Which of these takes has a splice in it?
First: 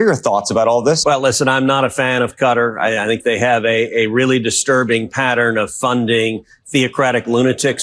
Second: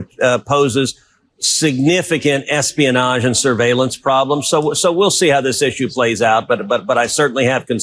first; 1 cut; at 1.0 s

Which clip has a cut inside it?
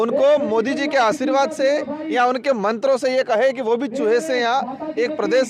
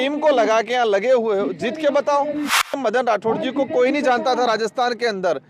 second; 1 cut; at 2.7 s

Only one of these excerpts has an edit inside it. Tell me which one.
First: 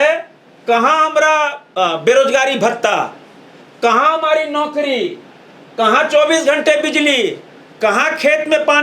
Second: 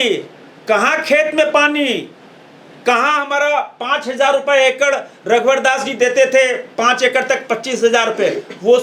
first; 1 cut; at 1.6 s

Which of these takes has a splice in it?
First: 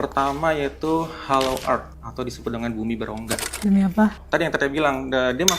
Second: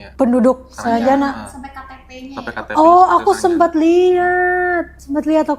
first; 1 cut; at 4.2 s

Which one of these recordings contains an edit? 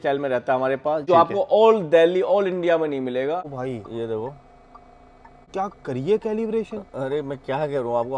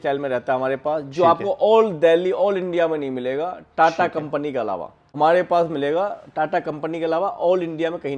first; 3 cuts; at 1.0 s, 3.5 s, 5.5 s

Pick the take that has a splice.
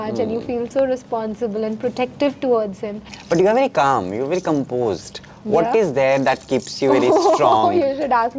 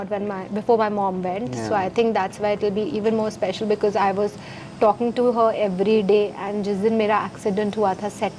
first; 1 cut; at 3.1 s

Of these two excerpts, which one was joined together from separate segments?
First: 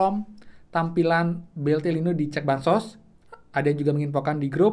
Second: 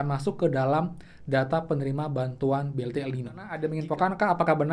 second; 1 cut; at 3.6 s

